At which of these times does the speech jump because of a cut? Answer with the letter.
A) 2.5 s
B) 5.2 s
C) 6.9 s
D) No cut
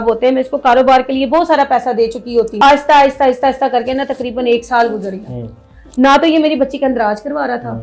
A